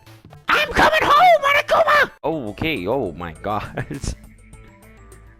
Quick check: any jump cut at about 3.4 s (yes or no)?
no